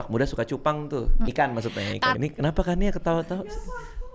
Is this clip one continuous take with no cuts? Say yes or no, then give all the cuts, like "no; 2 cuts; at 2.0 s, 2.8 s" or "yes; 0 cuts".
no; 1 cut; at 2.2 s